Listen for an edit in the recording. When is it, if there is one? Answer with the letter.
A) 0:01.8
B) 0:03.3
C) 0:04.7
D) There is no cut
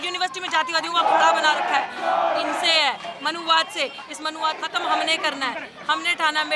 C